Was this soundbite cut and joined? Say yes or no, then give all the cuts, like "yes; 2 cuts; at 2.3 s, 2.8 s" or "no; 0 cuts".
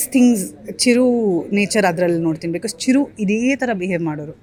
no; 0 cuts